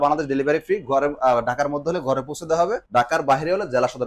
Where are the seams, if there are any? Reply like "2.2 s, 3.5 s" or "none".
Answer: 2.8 s